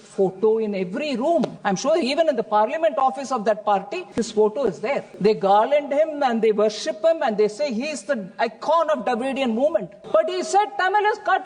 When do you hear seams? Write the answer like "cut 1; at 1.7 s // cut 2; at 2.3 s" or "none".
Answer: cut 1; at 1.6 s // cut 2; at 4.0 s // cut 3; at 5.1 s // cut 4; at 10.0 s